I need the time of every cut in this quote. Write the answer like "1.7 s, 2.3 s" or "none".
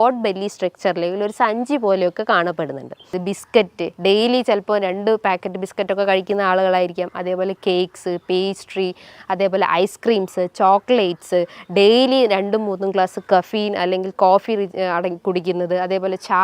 3.2 s